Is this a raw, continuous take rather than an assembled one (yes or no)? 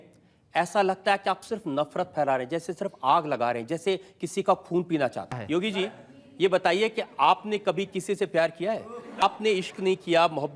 no